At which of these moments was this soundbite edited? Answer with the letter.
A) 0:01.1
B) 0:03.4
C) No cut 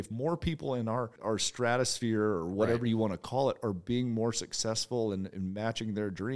A